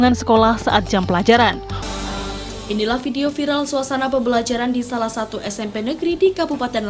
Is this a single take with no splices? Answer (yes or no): no